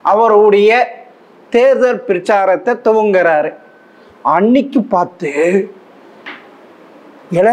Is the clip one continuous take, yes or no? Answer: yes